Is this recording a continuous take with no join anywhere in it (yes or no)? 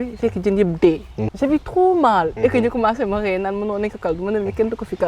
no